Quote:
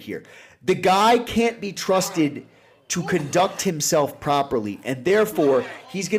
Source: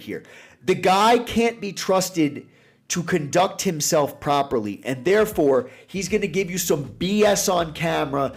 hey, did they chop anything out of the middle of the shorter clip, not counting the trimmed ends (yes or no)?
no